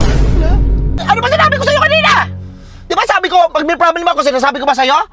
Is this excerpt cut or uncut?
cut